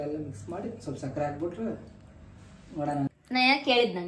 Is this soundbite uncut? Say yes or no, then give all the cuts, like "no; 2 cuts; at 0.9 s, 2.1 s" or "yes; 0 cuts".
no; 1 cut; at 3.1 s